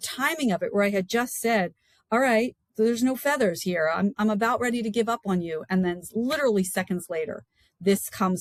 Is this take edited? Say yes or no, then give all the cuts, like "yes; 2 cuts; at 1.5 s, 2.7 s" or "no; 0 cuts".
no; 0 cuts